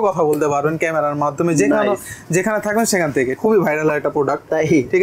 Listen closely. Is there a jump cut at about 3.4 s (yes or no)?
yes